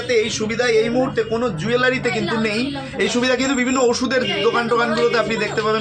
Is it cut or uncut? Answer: uncut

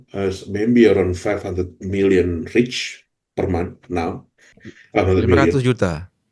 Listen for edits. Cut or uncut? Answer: uncut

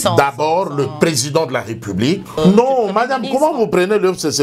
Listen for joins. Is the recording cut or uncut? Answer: cut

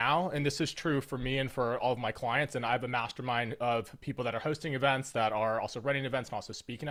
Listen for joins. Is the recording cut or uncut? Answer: uncut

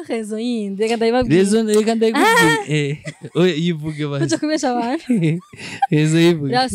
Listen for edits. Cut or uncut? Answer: uncut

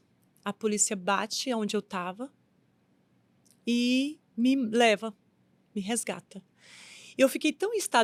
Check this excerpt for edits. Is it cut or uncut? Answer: uncut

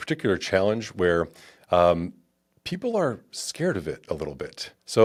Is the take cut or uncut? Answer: uncut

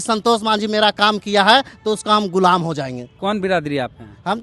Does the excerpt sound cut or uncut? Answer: cut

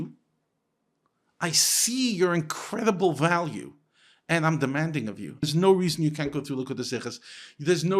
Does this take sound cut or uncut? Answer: cut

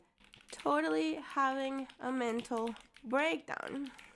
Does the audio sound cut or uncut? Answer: cut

